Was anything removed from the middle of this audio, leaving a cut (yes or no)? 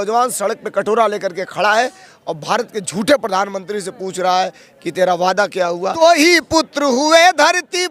yes